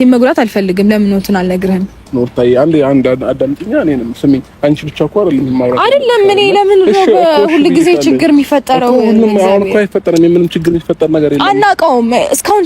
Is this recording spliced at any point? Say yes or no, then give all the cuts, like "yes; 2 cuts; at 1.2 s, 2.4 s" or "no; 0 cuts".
yes; 1 cut; at 2.1 s